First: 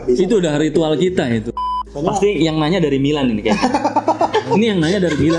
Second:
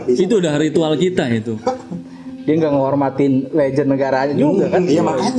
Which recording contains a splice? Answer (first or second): first